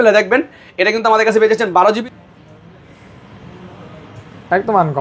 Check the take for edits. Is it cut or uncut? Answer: cut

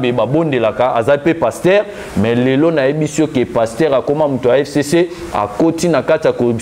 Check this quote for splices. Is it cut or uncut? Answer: uncut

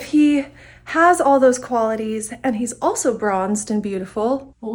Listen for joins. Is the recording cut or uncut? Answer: uncut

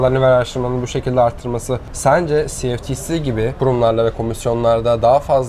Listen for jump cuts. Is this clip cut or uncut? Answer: cut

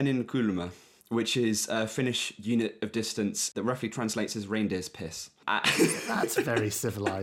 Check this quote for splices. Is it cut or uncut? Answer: cut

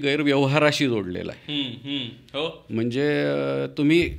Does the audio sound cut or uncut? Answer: uncut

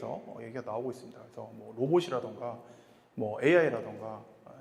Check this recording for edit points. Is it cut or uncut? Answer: uncut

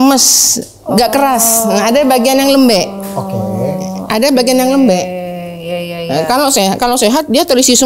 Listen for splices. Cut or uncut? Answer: uncut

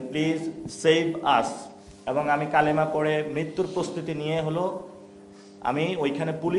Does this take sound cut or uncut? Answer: uncut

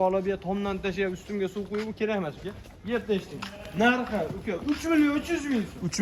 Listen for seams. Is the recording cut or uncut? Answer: uncut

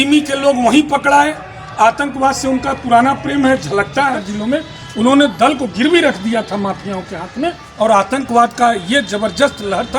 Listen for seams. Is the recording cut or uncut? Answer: cut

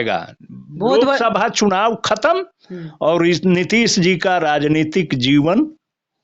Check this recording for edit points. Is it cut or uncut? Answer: uncut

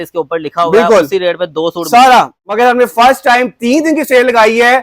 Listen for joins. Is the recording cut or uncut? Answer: cut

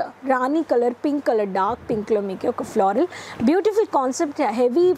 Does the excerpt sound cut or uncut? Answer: uncut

